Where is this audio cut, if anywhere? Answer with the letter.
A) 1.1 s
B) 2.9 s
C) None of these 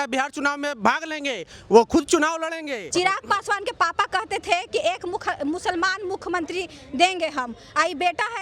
B